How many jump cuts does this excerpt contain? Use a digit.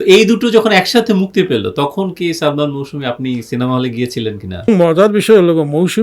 1